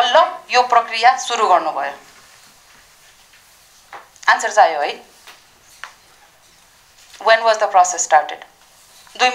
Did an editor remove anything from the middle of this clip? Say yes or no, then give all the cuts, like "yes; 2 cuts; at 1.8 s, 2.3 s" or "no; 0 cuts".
no; 0 cuts